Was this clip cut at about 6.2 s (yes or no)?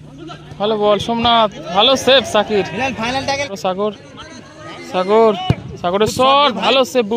no